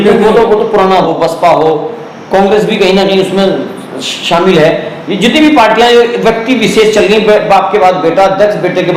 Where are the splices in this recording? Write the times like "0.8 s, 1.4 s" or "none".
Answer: 1.1 s